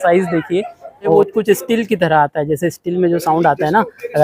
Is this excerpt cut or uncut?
cut